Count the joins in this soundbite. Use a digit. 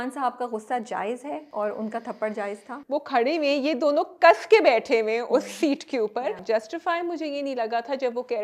3